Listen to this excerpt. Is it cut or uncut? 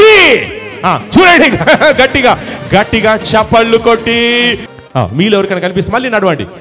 cut